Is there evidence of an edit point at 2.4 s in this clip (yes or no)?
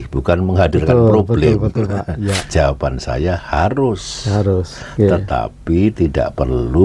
yes